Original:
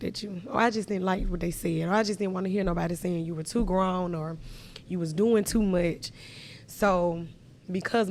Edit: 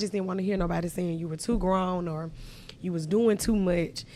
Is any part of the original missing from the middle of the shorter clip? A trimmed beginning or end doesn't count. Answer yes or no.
no